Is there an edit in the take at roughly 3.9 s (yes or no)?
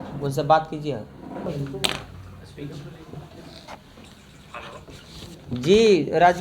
no